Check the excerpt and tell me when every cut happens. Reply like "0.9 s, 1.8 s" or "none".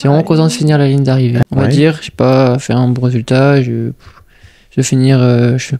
1.4 s

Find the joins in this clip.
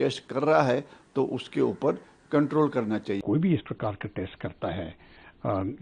3.2 s

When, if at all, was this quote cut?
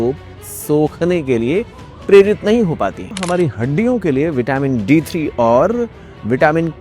3.1 s

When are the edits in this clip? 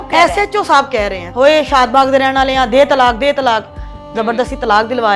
1.2 s

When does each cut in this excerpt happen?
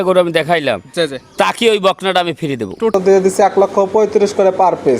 2.9 s

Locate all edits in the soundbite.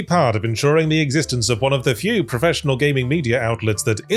none

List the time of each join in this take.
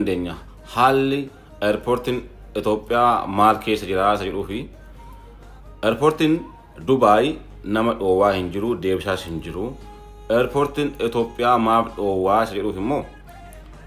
none

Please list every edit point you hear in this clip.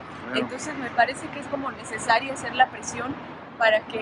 none

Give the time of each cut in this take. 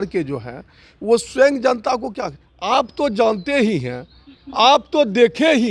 none

